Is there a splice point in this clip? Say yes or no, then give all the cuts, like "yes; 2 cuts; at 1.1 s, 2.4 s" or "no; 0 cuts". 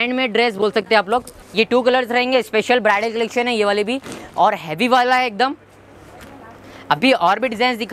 no; 0 cuts